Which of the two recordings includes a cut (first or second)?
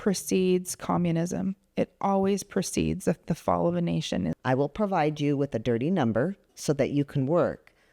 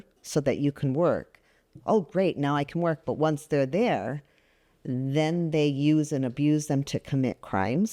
first